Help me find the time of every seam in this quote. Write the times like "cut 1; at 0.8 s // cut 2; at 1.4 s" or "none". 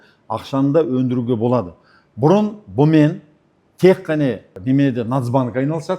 none